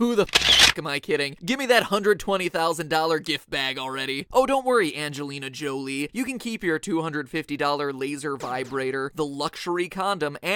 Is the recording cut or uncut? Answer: uncut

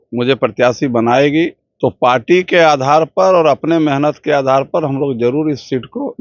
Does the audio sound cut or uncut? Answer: cut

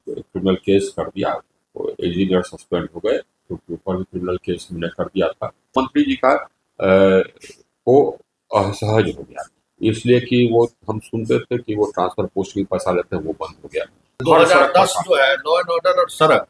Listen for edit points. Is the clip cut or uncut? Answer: cut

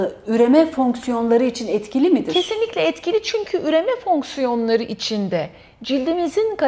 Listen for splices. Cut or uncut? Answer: uncut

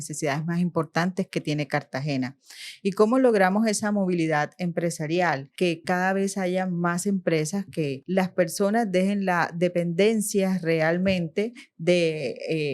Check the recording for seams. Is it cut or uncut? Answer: cut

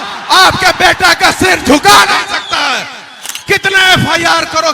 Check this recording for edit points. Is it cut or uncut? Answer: uncut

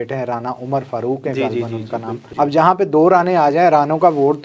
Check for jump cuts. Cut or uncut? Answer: cut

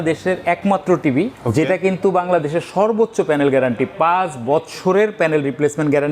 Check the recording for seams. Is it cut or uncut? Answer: cut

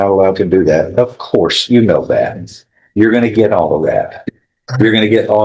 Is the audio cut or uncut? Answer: uncut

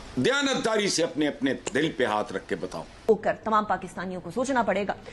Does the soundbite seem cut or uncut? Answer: cut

